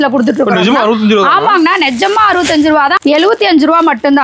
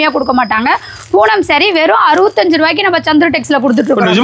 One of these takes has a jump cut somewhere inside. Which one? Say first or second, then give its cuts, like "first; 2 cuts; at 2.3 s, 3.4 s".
first; 1 cut; at 3.0 s